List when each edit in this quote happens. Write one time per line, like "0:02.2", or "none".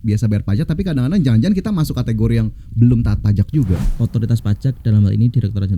0:03.9